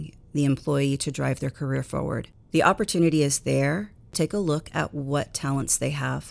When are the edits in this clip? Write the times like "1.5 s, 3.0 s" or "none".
4.0 s